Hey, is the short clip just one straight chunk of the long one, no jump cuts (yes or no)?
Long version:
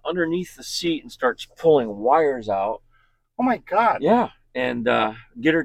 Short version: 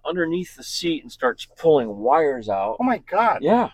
no